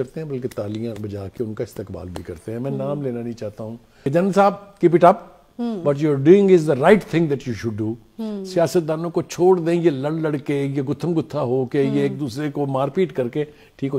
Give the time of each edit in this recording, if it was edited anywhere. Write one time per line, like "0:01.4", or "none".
0:04.1